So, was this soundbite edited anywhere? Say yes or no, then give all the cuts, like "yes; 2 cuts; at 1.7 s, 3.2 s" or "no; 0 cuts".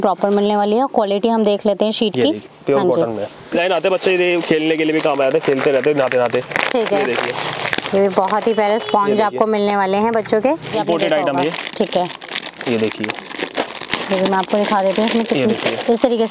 yes; 4 cuts; at 2.5 s, 3.6 s, 10.7 s, 14.0 s